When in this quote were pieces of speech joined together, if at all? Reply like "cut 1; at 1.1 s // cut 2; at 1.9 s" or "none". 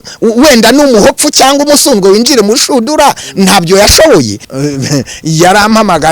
cut 1; at 4.4 s